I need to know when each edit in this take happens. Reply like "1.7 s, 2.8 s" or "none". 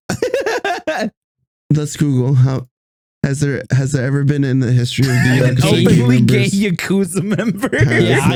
none